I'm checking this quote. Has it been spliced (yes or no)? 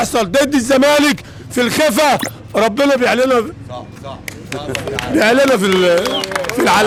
no